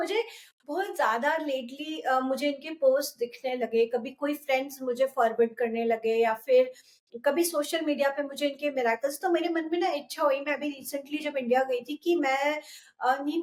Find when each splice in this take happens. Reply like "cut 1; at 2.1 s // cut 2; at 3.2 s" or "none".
none